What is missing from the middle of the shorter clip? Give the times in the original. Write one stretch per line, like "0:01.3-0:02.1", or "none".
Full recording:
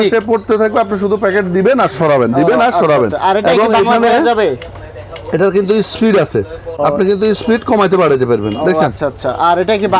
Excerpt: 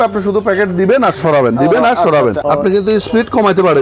0:03.1-0:06.7